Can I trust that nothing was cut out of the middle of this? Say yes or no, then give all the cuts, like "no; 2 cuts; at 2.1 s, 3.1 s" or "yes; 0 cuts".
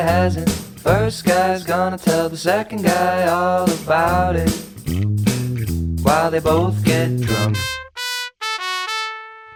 yes; 0 cuts